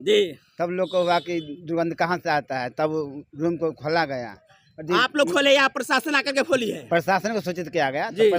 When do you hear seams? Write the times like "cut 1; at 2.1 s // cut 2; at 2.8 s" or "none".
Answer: none